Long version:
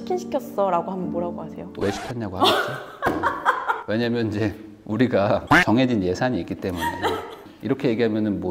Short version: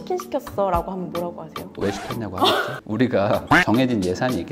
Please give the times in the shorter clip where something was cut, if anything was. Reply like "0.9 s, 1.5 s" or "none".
2.8 s